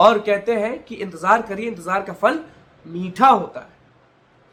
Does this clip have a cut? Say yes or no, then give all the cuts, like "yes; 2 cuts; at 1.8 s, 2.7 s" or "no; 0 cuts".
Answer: no; 0 cuts